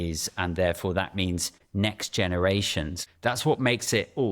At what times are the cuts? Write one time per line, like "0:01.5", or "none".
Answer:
0:01.6
0:03.0